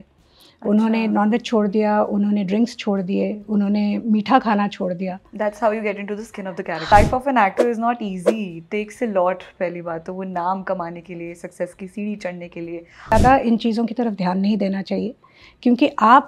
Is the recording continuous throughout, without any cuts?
no; 2 cuts; at 6.9 s, 13.1 s

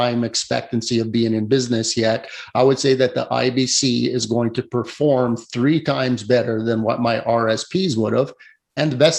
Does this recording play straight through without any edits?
yes; 0 cuts

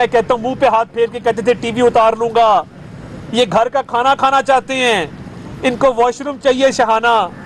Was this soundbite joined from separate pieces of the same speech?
no; 0 cuts

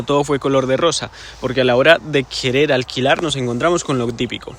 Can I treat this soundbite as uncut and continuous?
yes; 0 cuts

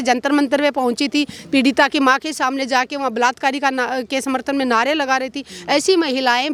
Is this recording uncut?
yes; 0 cuts

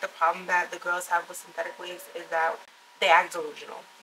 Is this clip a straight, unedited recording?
no; 1 cut; at 2.6 s

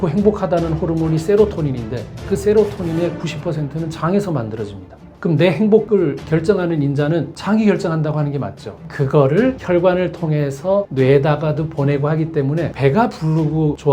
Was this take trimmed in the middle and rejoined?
no; 0 cuts

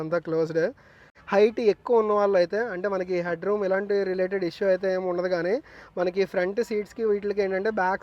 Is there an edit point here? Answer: no; 0 cuts

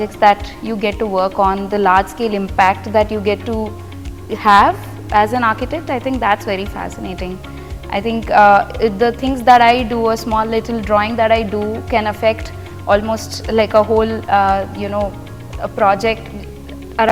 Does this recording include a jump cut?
no; 0 cuts

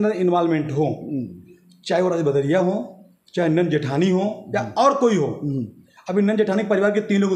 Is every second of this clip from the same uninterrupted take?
yes; 0 cuts

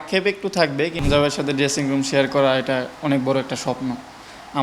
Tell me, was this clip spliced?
yes; 1 cut; at 1.0 s

